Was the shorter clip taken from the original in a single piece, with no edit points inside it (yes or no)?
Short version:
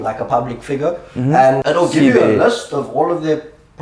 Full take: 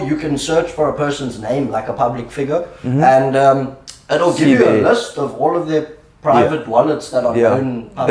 no